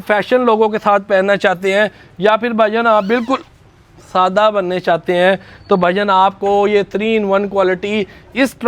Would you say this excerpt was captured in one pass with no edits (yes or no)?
yes